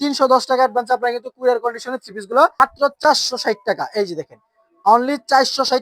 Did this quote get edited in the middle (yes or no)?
yes